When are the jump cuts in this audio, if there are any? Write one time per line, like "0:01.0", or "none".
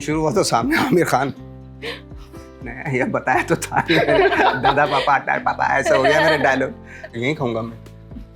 0:07.1